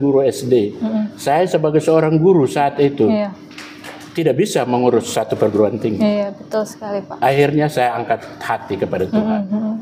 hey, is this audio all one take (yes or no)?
yes